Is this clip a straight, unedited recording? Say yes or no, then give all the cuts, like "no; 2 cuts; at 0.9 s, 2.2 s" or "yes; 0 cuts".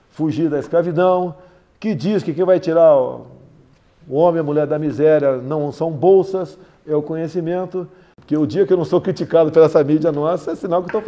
no; 1 cut; at 8.1 s